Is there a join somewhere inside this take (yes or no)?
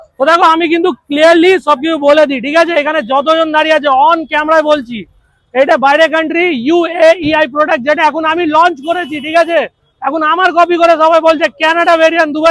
no